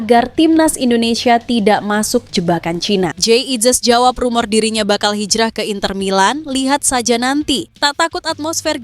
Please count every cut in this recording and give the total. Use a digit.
2